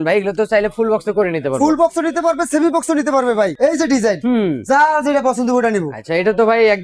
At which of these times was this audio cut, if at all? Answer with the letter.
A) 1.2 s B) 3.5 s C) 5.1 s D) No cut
B